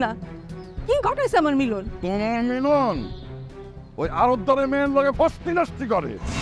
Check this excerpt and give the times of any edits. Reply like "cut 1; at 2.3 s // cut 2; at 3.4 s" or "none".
none